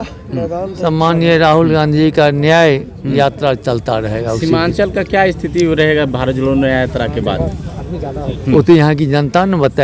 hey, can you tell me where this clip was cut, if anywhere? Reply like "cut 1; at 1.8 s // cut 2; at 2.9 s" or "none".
none